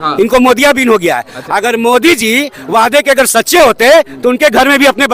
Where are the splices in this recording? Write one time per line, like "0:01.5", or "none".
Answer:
none